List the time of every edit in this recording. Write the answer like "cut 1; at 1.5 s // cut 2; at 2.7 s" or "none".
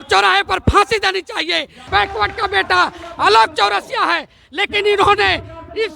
cut 1; at 1.9 s

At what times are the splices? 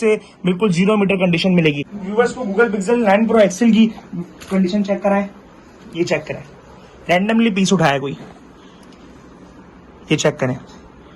cut 1; at 1.9 s

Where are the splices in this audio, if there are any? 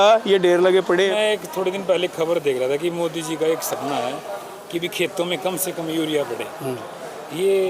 cut 1; at 1.1 s

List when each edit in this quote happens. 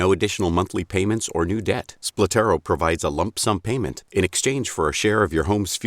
cut 1; at 3.8 s

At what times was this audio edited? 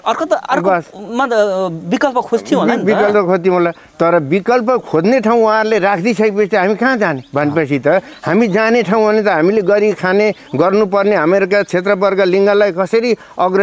none

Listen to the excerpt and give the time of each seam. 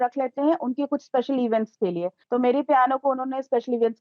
cut 1; at 2.2 s

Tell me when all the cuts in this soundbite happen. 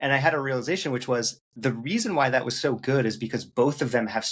cut 1; at 1.4 s

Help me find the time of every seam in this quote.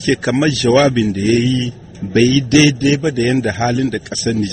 none

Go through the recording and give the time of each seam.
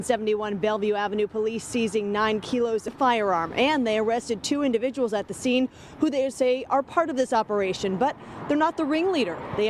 cut 1; at 2.9 s

